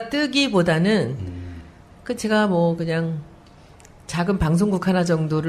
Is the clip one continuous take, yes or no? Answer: yes